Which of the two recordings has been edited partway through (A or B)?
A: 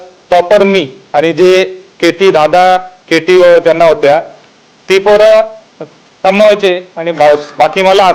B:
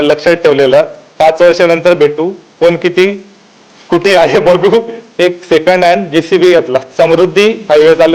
B